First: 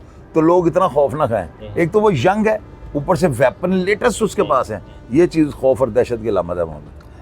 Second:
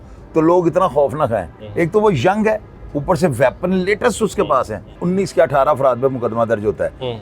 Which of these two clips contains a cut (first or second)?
second